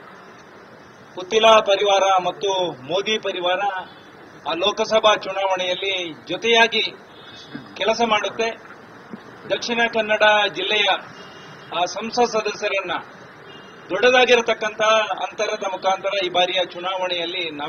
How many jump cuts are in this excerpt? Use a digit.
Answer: 1